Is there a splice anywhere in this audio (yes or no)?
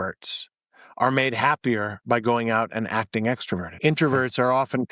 yes